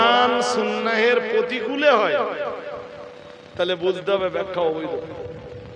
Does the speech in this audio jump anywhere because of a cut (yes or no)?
no